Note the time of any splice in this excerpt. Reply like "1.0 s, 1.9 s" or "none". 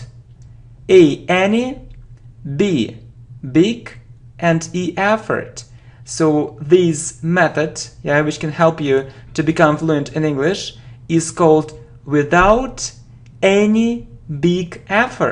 9.2 s